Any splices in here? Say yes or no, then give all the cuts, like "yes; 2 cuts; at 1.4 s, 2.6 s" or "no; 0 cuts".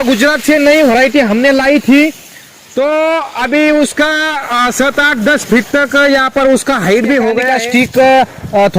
yes; 1 cut; at 7.5 s